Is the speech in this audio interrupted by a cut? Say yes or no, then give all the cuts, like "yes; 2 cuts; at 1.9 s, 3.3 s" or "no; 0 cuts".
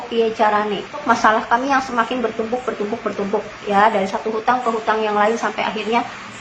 yes; 1 cut; at 1.0 s